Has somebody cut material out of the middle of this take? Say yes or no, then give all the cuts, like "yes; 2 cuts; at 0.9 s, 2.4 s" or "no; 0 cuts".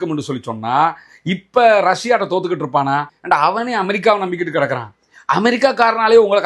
yes; 1 cut; at 3.1 s